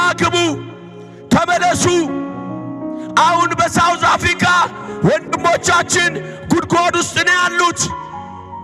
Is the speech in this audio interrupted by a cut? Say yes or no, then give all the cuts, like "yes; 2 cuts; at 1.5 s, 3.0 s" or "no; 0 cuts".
no; 0 cuts